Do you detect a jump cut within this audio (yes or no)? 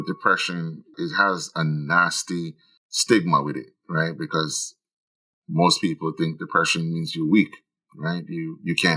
yes